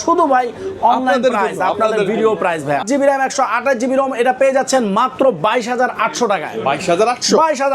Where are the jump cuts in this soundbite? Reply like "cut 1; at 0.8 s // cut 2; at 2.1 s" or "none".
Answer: cut 1; at 2.8 s